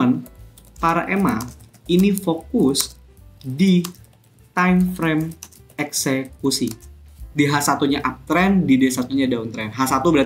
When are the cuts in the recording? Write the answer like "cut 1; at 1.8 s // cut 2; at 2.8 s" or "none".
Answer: cut 1; at 7.3 s